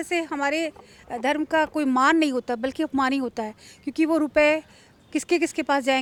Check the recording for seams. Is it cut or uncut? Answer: uncut